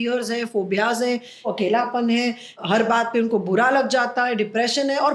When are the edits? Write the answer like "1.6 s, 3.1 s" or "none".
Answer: 1.5 s, 2.6 s